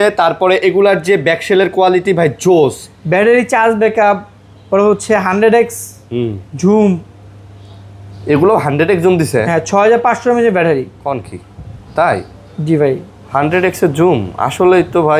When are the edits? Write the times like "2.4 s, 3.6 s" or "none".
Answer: none